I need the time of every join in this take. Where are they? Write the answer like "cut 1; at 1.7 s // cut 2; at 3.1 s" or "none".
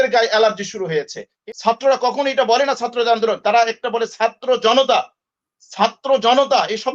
cut 1; at 1.3 s